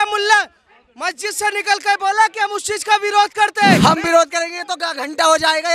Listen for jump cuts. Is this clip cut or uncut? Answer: cut